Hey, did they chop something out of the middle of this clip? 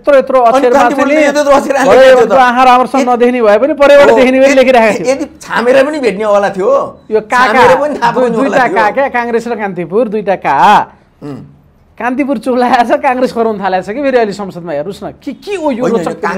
no; 0 cuts

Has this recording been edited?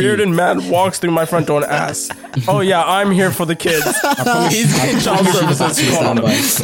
no; 0 cuts

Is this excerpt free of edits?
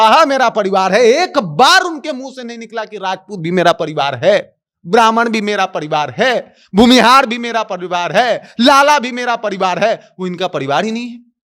yes; 0 cuts

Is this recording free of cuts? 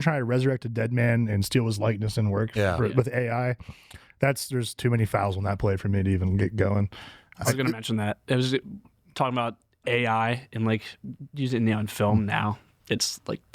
yes; 0 cuts

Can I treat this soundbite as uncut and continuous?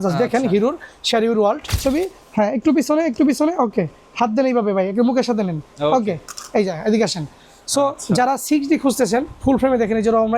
no; 1 cut; at 1.8 s

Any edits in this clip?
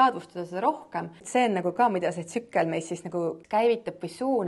yes; 2 cuts; at 1.2 s, 3.4 s

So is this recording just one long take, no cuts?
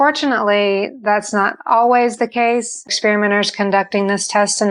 no; 1 cut; at 2.9 s

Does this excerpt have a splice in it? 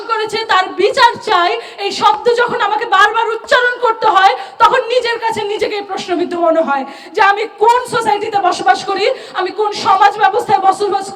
no; 0 cuts

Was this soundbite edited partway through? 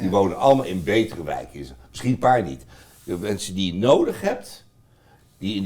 no; 0 cuts

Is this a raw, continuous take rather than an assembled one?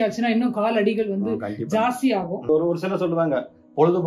no; 1 cut; at 2.5 s

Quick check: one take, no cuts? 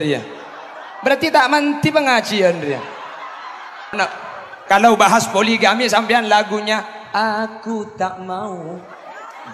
no; 1 cut; at 4.0 s

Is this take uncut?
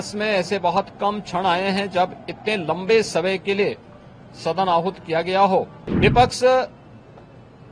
no; 1 cut; at 5.8 s

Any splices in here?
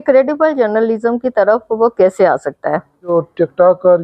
yes; 1 cut; at 3.1 s

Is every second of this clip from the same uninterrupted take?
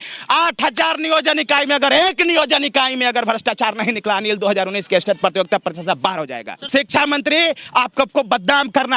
no; 1 cut; at 6.6 s

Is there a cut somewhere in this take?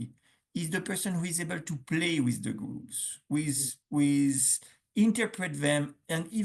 no; 0 cuts

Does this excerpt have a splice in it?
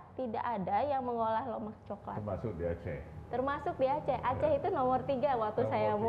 no; 0 cuts

